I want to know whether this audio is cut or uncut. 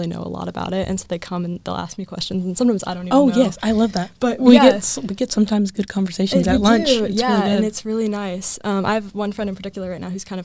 uncut